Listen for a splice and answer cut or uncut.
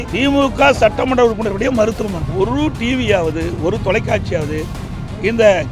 cut